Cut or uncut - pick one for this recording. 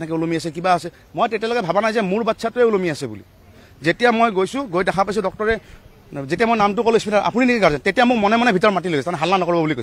uncut